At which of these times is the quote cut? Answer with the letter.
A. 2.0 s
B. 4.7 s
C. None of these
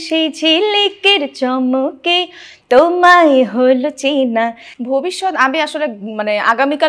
B